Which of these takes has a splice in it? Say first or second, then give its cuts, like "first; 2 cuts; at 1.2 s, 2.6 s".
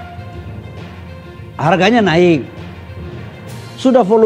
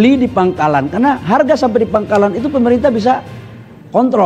first; 1 cut; at 0.9 s